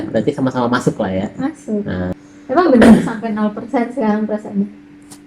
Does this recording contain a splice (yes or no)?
yes